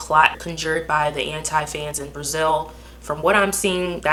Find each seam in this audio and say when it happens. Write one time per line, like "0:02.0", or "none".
none

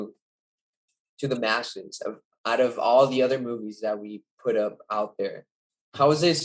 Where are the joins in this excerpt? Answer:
none

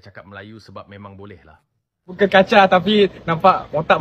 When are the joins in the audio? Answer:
0:02.0

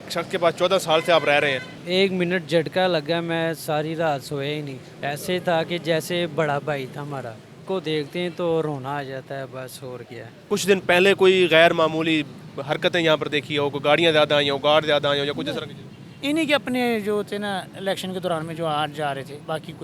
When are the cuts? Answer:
0:01.7
0:04.8
0:07.6
0:10.3

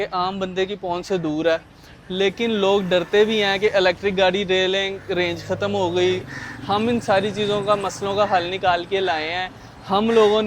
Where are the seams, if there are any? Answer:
0:06.2

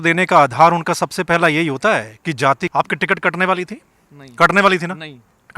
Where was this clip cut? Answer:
0:02.6

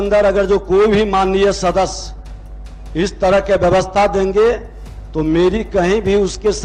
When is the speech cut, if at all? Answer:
none

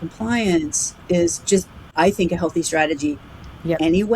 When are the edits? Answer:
0:01.8

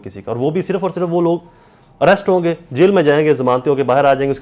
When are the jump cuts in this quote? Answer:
none

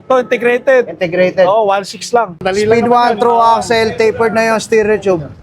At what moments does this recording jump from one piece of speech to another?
0:02.4

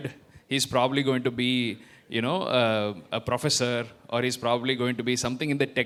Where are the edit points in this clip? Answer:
none

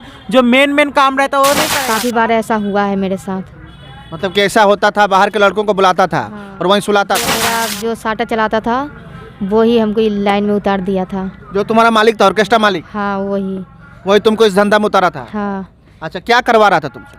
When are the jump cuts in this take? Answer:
0:01.7
0:07.5

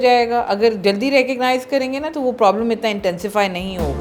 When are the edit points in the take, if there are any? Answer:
none

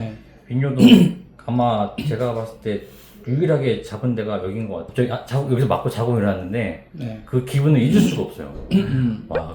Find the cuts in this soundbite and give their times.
0:04.9

